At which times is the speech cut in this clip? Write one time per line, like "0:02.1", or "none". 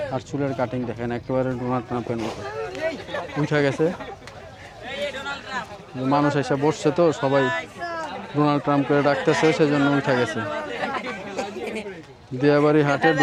none